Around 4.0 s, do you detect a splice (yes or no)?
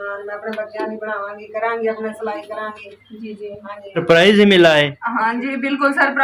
yes